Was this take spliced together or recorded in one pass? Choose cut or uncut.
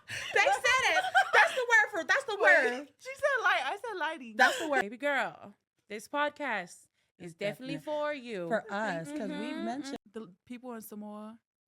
cut